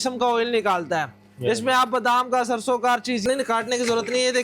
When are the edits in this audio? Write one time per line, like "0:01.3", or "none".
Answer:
0:03.2